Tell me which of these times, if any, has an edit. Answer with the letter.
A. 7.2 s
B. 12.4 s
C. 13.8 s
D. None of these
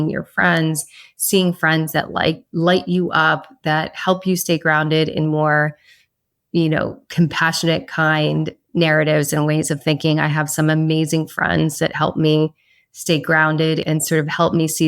C